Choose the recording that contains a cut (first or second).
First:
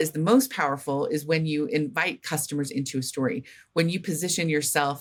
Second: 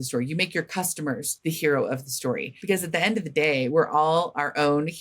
second